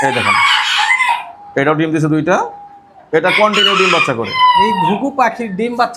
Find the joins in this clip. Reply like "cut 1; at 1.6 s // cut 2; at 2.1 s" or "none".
none